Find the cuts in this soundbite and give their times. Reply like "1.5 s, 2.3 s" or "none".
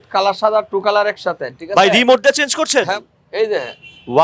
2.9 s